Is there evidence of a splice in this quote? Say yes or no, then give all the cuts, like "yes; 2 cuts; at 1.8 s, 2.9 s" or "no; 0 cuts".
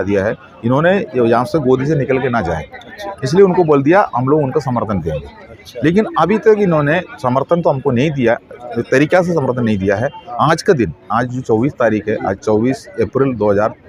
no; 0 cuts